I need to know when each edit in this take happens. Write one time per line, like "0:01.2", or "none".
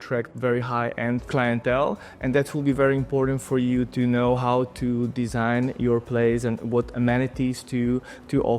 none